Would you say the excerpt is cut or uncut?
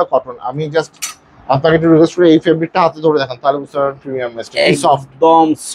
uncut